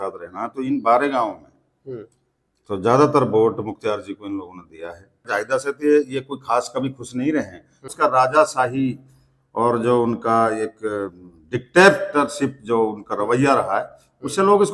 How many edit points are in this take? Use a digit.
2